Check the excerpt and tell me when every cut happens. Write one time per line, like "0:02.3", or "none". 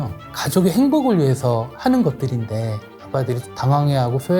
0:02.9